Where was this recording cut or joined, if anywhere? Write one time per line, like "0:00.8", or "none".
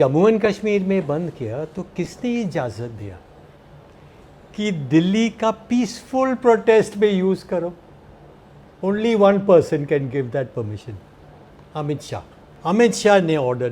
0:12.4